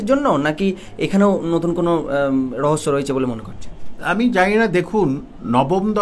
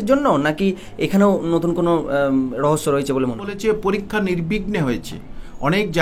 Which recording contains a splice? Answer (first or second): second